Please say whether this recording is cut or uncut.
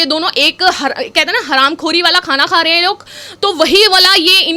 uncut